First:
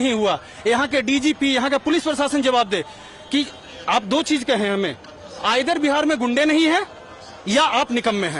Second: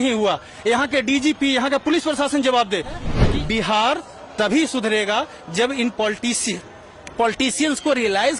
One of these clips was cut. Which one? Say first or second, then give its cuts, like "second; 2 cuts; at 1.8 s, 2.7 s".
second; 1 cut; at 3.2 s